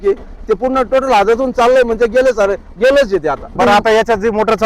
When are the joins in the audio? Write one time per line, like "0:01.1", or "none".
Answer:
0:03.6